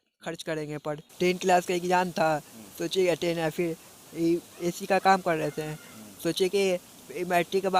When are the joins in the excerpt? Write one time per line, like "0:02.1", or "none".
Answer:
0:01.1